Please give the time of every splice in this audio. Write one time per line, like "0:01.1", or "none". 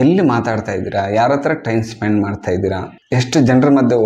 0:02.9